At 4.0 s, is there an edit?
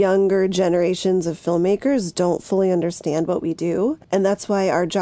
yes; 1 cut; at 4.0 s

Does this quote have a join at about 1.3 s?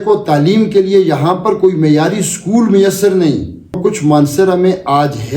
no; 1 cut; at 3.8 s

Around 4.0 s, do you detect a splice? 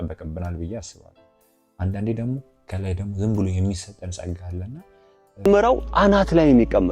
no; 1 cut; at 5.5 s

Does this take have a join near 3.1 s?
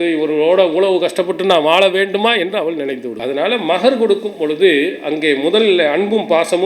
yes; 1 cut; at 3.1 s

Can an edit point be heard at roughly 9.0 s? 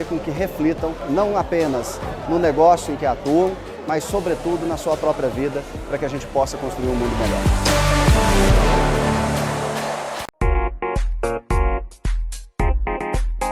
no; 1 cut; at 10.3 s

